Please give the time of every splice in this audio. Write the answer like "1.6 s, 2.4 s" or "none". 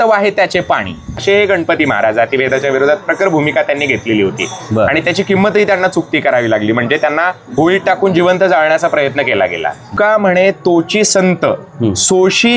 1.2 s, 9.9 s